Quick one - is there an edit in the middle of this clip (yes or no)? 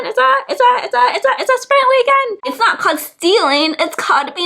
yes